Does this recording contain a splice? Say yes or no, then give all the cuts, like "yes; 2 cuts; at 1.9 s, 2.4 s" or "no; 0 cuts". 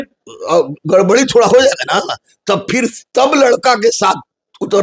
no; 0 cuts